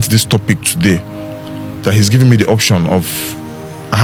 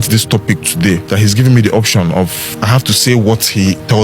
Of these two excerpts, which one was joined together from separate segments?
second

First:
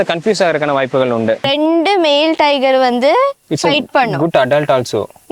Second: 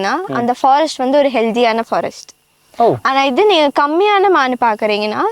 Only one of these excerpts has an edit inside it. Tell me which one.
first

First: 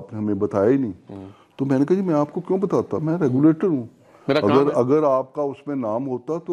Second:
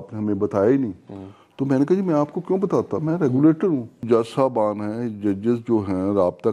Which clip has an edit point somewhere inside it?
second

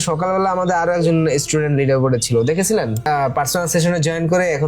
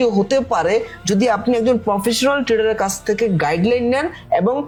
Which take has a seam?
first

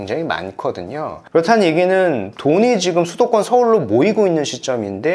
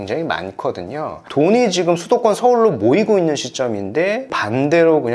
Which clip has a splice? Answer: second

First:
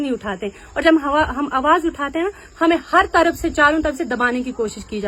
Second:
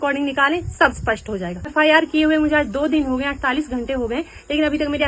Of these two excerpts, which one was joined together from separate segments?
second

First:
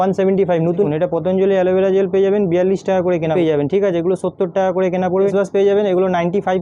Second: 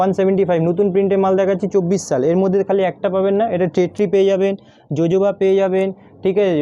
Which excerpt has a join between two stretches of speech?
first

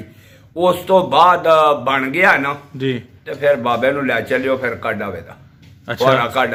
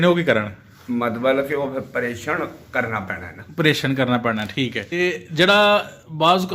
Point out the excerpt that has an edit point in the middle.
second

